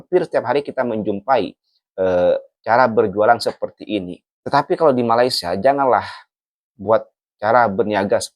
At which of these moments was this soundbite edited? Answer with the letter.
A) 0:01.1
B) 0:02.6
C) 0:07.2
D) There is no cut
C